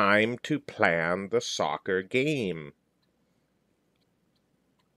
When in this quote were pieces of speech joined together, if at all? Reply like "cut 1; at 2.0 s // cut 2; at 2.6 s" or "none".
cut 1; at 4.0 s